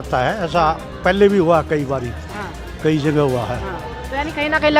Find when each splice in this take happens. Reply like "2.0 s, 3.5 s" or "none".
none